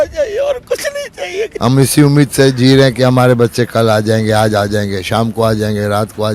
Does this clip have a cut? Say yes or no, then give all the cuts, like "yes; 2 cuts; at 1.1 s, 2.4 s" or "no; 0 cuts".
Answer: yes; 1 cut; at 1.5 s